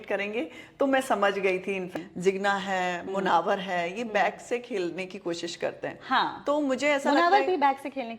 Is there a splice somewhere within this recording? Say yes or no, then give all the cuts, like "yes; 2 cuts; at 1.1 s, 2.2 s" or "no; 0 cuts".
yes; 1 cut; at 1.9 s